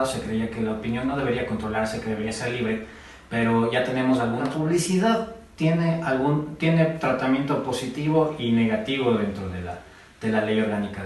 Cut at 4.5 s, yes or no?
yes